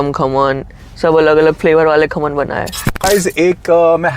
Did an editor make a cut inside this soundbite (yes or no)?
yes